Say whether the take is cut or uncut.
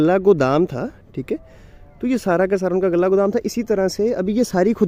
uncut